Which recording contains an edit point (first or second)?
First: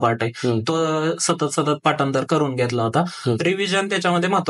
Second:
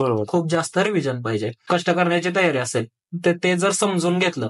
second